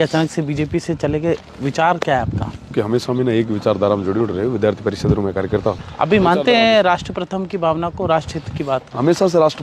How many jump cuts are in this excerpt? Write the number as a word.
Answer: two